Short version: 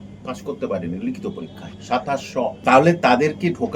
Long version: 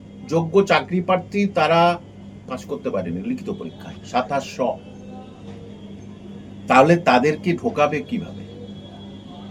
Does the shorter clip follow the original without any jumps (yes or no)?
no